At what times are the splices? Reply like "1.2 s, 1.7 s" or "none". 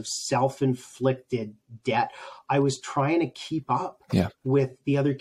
none